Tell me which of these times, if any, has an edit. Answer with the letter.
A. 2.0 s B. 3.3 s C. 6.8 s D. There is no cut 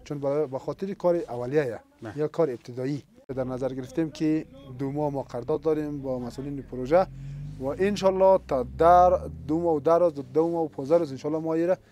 B